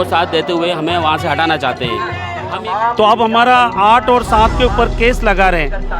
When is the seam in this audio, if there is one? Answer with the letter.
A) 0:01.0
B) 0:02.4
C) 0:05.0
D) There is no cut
B